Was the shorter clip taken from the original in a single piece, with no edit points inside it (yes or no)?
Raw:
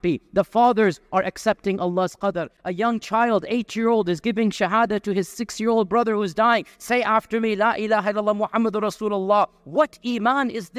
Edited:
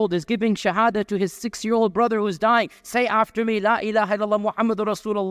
yes